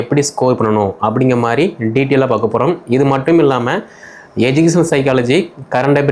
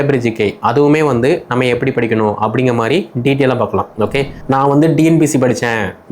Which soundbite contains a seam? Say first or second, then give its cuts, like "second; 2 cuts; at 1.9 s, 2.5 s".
second; 1 cut; at 4.4 s